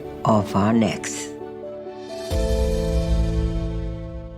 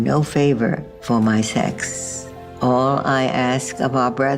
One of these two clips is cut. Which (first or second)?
first